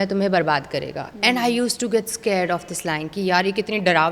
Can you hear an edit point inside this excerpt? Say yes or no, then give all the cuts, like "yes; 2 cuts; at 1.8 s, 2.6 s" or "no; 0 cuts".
no; 0 cuts